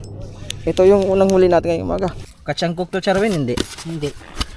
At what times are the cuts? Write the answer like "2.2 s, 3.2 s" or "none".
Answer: 2.3 s